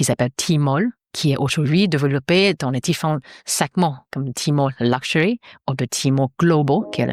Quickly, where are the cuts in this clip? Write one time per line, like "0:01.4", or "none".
0:01.1